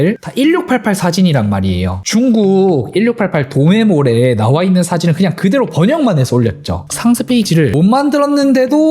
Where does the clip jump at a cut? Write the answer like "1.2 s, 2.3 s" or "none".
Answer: 6.8 s